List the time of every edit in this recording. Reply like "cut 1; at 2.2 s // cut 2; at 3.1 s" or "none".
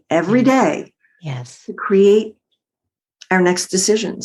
none